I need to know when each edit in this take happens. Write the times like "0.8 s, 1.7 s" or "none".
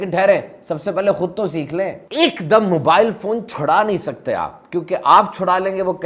none